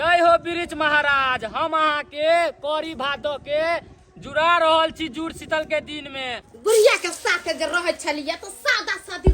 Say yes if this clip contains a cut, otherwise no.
yes